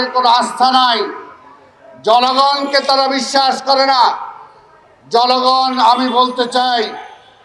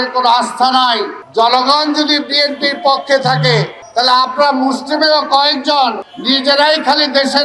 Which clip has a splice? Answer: second; 3 cuts; at 1.2 s, 3.8 s, 6.1 s

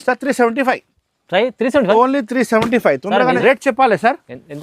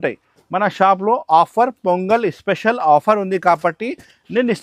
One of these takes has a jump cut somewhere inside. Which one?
first; 1 cut; at 3.4 s

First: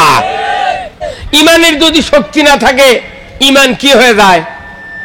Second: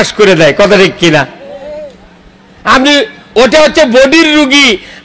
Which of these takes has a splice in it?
first; 1 cut; at 1.1 s

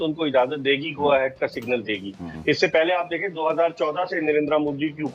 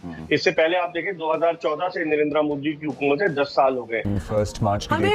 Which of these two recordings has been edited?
second; 1 cut; at 4.1 s

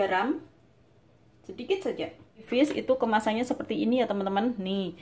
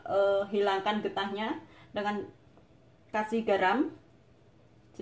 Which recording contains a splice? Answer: first; 1 cut; at 2.4 s

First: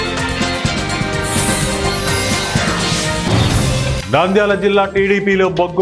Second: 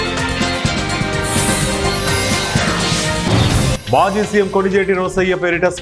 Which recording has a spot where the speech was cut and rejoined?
first; 1 cut; at 3.7 s

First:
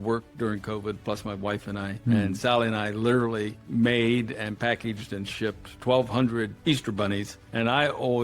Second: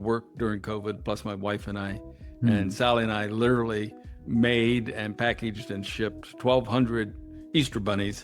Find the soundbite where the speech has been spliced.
first; 4 cuts; at 1.9 s, 3.6 s, 6.6 s, 7.4 s

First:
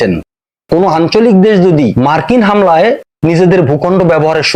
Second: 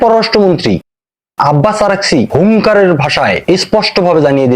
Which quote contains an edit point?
second; 2 cuts; at 2.3 s, 3.4 s

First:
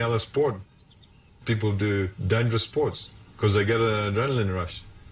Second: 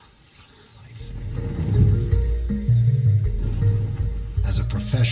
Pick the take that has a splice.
second; 1 cut; at 1.1 s

